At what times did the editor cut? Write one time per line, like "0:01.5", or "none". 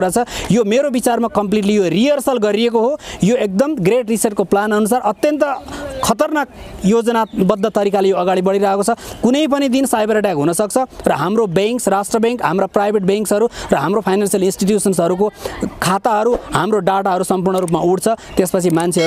none